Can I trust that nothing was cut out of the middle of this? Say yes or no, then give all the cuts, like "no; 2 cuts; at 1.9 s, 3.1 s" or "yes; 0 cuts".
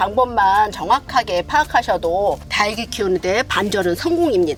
yes; 0 cuts